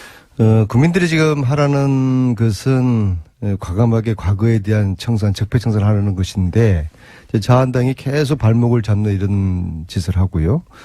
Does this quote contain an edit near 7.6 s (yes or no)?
no